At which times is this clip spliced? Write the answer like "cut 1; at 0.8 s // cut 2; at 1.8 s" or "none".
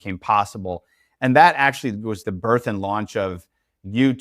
cut 1; at 2.2 s

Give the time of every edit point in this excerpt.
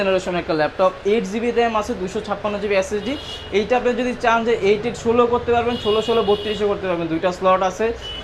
none

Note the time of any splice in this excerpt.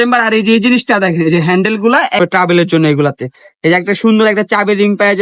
cut 1; at 2.2 s

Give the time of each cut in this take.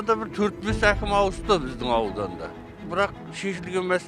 cut 1; at 2.8 s

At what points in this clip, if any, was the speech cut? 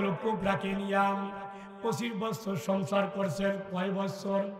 none

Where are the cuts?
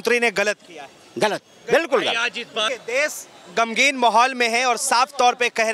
none

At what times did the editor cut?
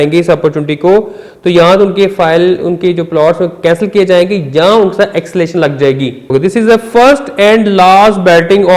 cut 1; at 6.3 s

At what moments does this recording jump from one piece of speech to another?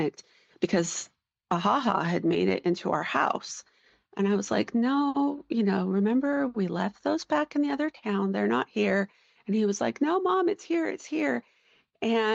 none

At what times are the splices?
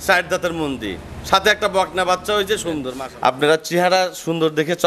cut 1; at 2.9 s

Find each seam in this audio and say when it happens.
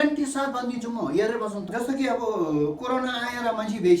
cut 1; at 1.7 s

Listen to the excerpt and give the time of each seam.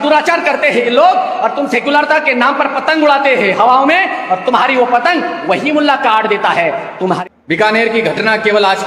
cut 1; at 7.2 s

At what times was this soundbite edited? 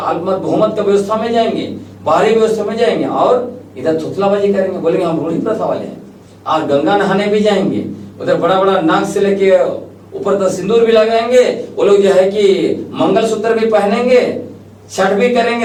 none

